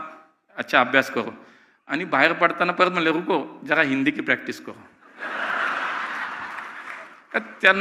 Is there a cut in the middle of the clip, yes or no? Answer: no